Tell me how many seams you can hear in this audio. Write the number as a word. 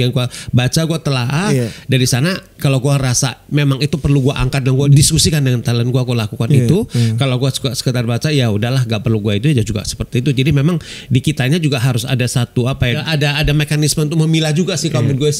two